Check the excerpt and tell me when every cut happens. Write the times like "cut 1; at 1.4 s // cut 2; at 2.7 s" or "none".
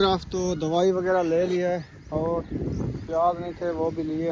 none